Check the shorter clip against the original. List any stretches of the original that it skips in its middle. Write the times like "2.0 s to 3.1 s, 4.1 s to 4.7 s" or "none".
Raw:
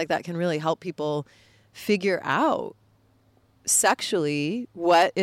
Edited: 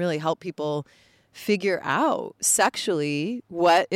2.8 s to 3.6 s